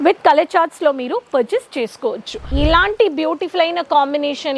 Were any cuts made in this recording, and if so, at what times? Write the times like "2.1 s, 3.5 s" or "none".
2.4 s